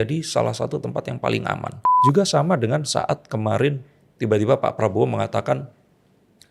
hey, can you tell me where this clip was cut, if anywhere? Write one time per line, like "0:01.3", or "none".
0:01.9